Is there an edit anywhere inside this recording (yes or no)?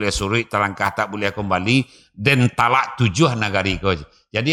no